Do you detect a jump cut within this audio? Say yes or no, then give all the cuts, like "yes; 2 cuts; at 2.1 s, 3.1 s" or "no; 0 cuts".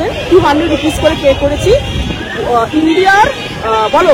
no; 0 cuts